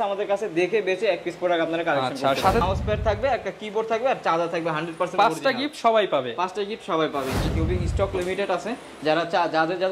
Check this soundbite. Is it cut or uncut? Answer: cut